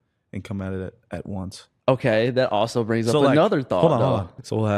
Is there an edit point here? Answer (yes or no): no